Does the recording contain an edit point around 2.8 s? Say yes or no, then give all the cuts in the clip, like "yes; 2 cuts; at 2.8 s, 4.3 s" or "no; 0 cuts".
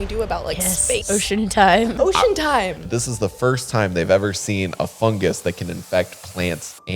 yes; 3 cuts; at 1.0 s, 1.9 s, 2.8 s